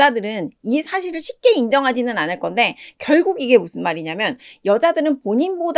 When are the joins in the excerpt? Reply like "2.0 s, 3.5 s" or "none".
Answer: none